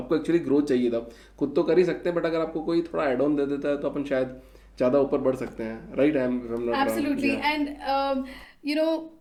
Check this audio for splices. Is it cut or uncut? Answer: uncut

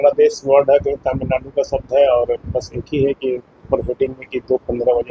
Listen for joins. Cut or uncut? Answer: uncut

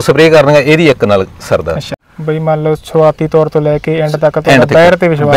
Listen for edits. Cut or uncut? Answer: uncut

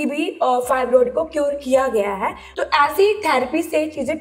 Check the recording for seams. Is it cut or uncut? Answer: cut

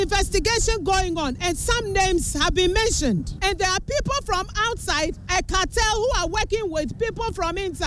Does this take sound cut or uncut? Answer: cut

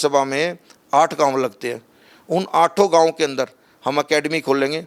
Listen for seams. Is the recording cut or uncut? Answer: uncut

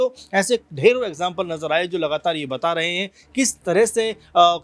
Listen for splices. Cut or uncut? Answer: uncut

